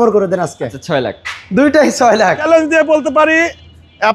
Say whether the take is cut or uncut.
cut